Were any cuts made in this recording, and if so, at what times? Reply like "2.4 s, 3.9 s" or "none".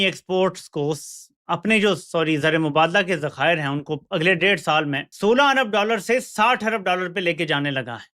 none

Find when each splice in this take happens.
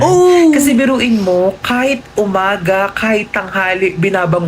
none

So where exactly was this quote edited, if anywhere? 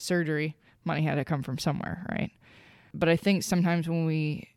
2.9 s

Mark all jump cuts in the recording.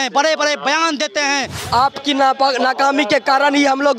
1.6 s

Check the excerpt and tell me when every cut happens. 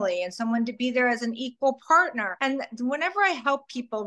2.3 s

